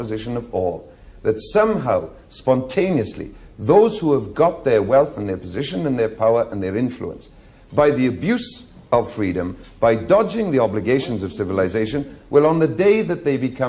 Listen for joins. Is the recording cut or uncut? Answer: uncut